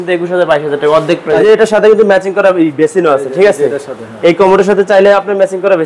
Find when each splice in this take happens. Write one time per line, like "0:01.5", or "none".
0:01.4